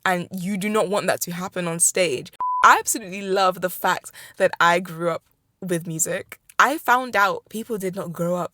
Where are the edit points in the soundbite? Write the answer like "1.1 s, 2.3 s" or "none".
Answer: 2.5 s, 7.4 s